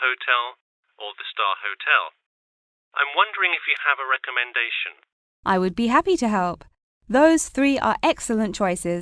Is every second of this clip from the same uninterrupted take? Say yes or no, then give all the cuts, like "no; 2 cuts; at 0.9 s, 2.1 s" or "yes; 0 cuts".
no; 1 cut; at 1.2 s